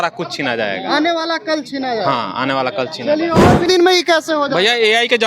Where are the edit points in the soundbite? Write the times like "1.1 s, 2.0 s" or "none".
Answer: 3.6 s